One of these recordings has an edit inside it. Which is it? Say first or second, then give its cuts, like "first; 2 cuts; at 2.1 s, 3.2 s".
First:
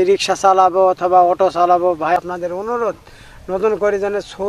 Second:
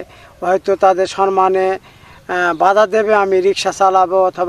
first; 1 cut; at 2.2 s